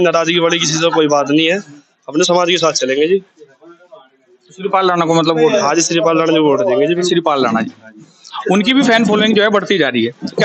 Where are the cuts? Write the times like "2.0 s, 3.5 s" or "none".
7.1 s